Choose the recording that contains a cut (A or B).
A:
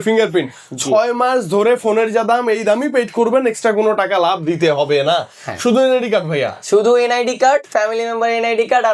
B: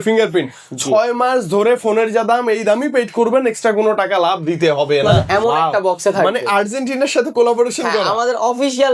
B